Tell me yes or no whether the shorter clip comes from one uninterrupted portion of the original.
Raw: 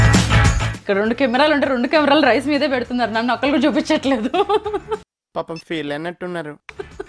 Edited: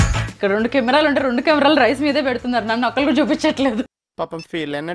no